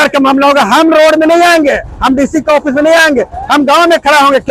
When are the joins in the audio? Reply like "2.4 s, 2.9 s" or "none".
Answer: none